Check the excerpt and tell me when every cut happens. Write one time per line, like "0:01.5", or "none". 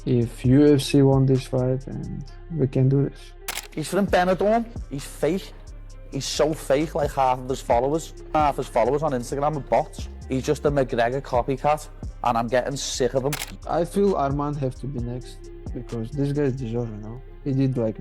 0:03.5
0:13.5